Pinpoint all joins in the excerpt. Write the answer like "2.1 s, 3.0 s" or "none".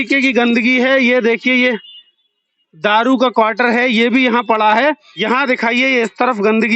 5.1 s